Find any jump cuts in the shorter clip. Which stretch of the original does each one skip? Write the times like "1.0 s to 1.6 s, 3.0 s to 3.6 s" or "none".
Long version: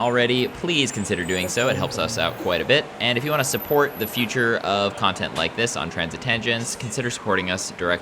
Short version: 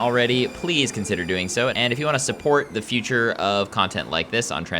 1.7 s to 3.0 s